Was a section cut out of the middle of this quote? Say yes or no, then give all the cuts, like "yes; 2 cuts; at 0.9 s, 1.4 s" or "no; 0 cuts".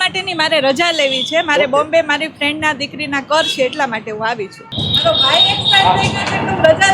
yes; 1 cut; at 4.6 s